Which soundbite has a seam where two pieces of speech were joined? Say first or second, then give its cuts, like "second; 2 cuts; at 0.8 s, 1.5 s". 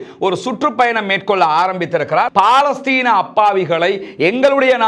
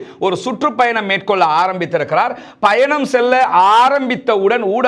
first; 1 cut; at 2.3 s